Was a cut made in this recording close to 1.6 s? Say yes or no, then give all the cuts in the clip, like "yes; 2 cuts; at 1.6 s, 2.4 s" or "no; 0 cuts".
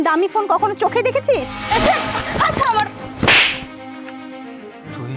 yes; 1 cut; at 1.6 s